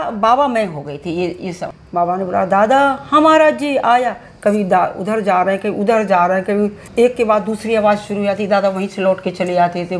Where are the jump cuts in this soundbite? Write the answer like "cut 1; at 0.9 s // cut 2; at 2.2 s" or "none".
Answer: cut 1; at 1.7 s // cut 2; at 6.8 s